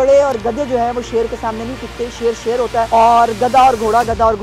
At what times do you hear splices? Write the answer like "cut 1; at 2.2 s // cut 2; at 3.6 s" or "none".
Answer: cut 1; at 2.9 s